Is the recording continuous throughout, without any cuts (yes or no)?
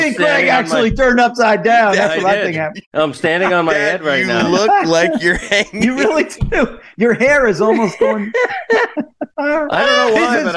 no